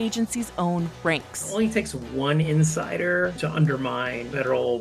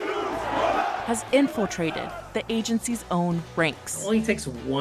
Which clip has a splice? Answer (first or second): first